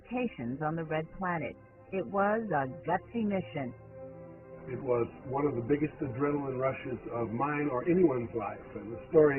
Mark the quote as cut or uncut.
cut